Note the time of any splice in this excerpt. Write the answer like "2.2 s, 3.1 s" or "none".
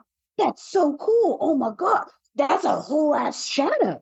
none